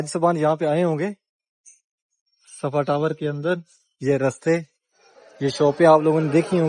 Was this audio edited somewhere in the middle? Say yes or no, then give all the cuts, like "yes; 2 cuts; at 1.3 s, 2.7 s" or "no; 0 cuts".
no; 0 cuts